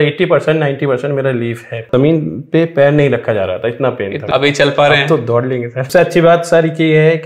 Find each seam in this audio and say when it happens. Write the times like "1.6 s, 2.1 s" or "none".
1.8 s, 4.2 s, 5.9 s

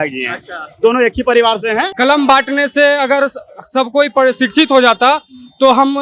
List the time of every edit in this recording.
1.9 s

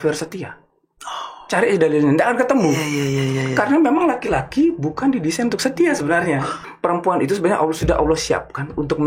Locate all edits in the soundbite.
6.6 s

